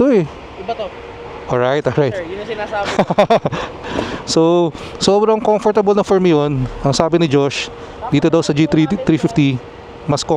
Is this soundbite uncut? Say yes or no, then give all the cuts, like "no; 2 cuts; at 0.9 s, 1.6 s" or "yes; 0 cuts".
yes; 0 cuts